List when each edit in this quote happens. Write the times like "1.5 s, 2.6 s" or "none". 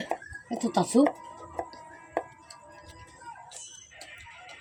none